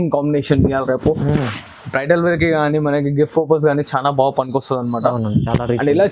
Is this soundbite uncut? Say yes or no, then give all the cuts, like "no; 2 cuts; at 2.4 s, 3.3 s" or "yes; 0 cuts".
yes; 0 cuts